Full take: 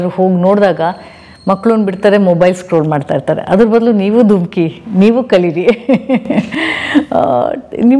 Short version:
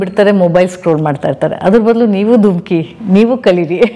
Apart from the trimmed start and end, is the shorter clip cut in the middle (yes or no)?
no